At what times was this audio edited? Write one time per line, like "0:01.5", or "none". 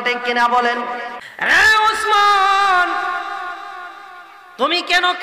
0:01.1